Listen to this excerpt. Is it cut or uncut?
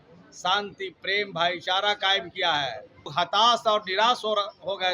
cut